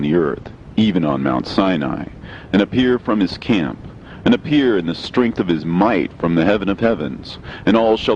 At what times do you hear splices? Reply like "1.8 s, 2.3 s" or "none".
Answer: none